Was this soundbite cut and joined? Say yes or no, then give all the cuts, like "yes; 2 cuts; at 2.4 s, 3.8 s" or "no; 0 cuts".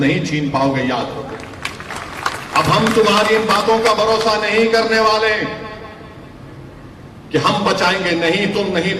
no; 0 cuts